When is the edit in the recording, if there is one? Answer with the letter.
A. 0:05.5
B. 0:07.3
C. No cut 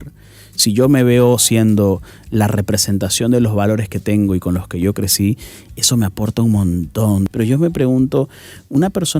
B